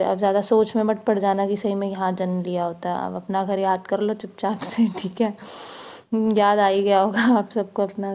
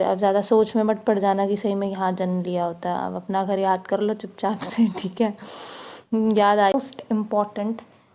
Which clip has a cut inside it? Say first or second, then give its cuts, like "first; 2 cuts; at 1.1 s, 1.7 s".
second; 1 cut; at 6.7 s